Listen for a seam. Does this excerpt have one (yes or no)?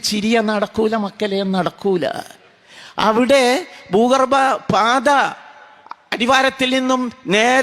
no